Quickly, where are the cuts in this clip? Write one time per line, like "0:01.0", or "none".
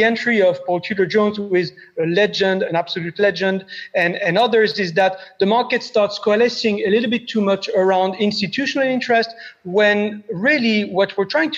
none